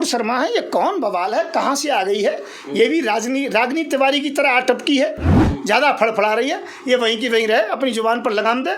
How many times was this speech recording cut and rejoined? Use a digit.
1